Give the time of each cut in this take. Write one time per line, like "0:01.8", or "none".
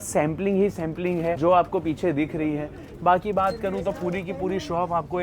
0:01.4

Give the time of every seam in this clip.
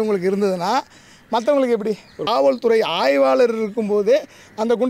0:02.2

